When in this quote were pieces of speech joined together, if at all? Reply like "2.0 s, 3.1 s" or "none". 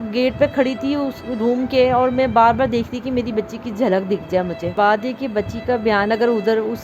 4.7 s